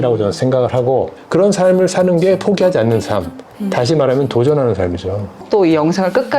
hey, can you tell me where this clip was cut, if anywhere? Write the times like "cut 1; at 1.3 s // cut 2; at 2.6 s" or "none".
cut 1; at 1.2 s // cut 2; at 5.4 s

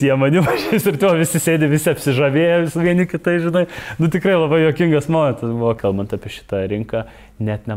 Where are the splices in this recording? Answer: cut 1; at 5.8 s

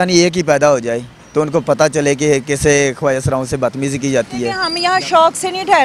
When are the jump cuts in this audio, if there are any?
cut 1; at 4.7 s

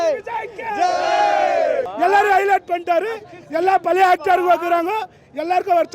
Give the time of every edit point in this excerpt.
cut 1; at 1.9 s

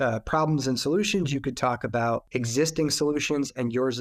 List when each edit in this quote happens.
none

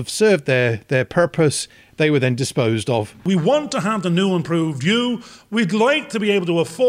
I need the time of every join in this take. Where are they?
cut 1; at 3.2 s

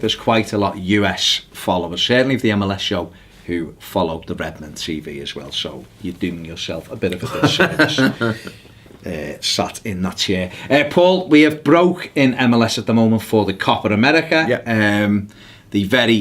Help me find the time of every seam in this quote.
cut 1; at 10.5 s

